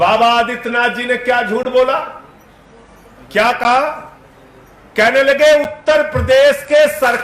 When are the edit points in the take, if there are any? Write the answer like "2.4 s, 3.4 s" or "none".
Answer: none